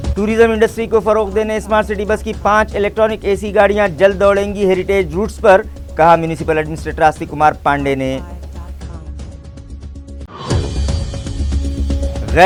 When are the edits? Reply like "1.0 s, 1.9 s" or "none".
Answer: none